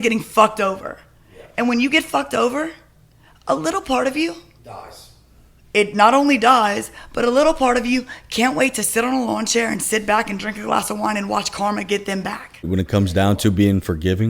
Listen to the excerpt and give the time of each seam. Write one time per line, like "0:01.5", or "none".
0:12.7

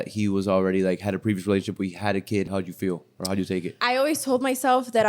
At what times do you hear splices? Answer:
0:02.5
0:03.7

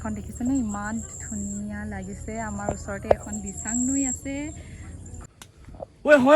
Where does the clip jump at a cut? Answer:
0:05.0

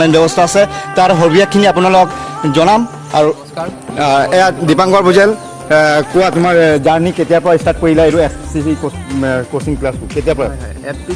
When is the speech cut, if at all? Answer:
0:03.4

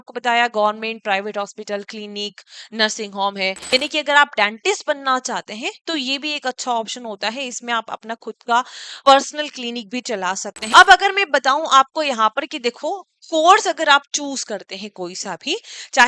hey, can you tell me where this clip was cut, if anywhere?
0:03.6
0:10.5

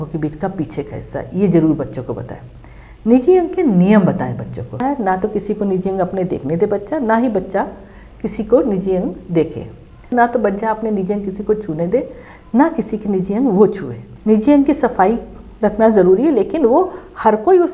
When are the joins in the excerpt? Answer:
0:04.8
0:10.1
0:14.1

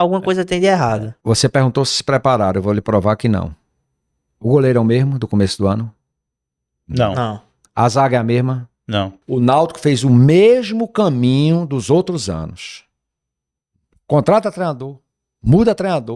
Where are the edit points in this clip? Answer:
0:01.1
0:09.2

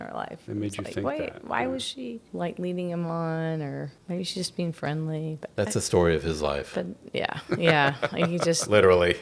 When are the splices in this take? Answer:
none

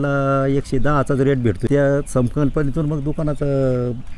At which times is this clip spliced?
0:01.6

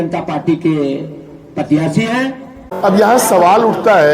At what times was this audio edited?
0:02.6

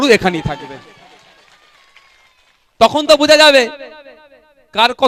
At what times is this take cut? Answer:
none

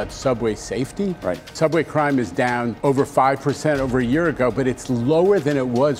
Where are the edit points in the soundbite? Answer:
0:01.5
0:02.7

